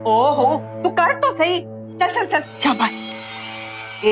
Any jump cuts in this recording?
no; 0 cuts

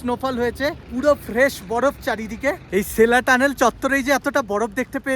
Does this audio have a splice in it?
no; 0 cuts

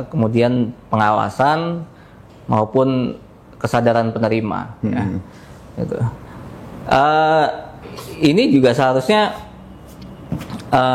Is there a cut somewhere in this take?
no; 0 cuts

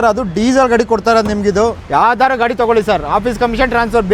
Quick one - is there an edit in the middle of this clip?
yes; 1 cut; at 1.8 s

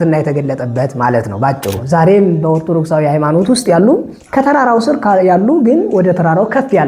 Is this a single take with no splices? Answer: no; 1 cut; at 2.0 s

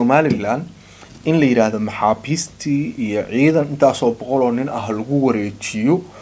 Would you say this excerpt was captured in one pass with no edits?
yes; 0 cuts

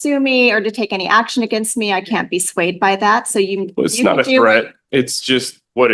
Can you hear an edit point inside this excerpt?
no; 0 cuts

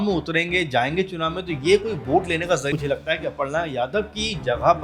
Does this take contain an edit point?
yes; 1 cut; at 2.7 s

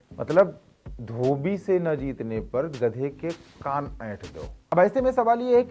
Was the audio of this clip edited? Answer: yes; 1 cut; at 4.7 s

